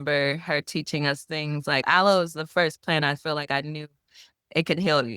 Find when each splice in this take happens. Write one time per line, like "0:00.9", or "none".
0:01.8